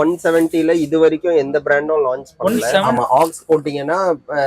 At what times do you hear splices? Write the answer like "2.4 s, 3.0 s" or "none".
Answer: 2.9 s

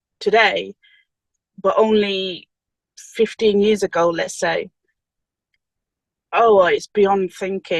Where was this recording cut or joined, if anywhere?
none

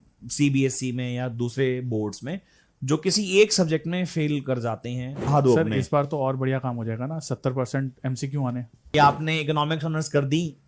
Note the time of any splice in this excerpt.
5.3 s, 8.9 s

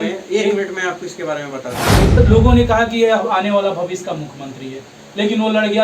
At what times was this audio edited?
2.2 s

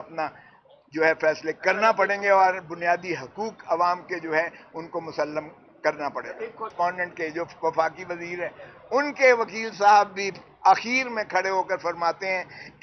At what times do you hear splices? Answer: 6.7 s

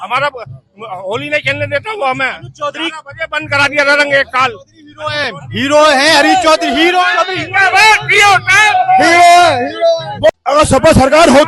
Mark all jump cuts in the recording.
10.3 s

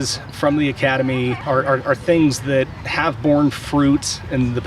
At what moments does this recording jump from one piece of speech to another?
1.4 s

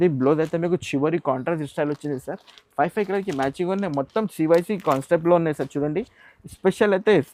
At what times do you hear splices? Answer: none

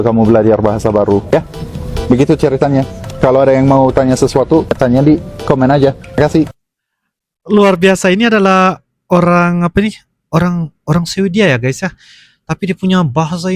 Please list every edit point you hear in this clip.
none

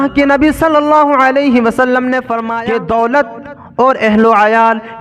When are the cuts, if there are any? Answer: 2.5 s

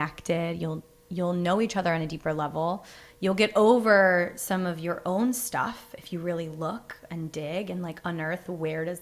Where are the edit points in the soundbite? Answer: none

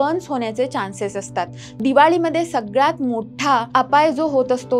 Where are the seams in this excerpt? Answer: 1.7 s, 3.7 s

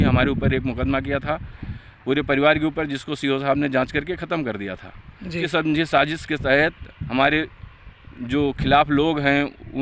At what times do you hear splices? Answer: 5.4 s

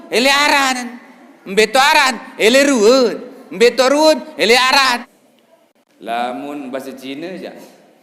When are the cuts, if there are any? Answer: 5.1 s

